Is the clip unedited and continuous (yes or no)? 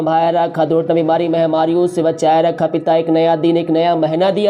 yes